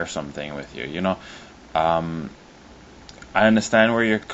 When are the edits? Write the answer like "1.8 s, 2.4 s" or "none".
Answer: 2.4 s